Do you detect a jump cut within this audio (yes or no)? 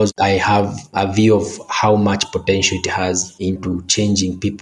no